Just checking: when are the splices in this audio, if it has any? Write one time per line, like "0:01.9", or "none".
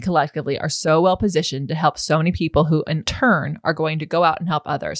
0:03.0